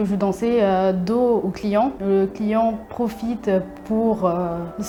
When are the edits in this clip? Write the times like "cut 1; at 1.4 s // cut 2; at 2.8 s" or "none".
none